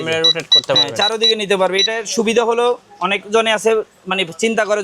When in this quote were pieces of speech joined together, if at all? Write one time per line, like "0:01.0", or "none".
none